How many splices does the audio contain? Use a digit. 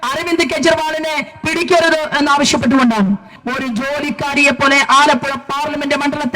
1